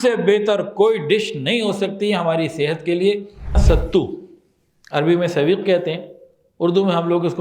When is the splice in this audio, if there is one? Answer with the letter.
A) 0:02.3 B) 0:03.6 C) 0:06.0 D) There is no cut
B